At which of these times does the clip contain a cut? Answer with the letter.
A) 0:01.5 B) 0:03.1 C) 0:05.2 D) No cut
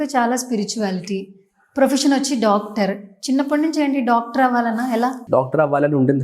C